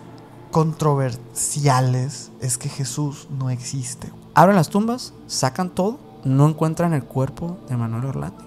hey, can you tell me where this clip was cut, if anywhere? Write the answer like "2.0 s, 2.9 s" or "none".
4.1 s, 6.1 s